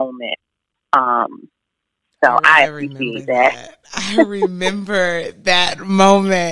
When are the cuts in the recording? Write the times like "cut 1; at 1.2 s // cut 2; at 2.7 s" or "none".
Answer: none